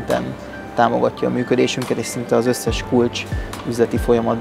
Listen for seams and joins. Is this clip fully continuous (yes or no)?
yes